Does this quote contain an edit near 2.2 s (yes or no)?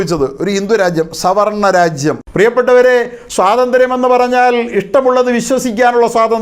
yes